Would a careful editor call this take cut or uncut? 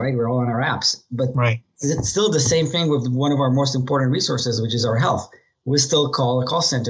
uncut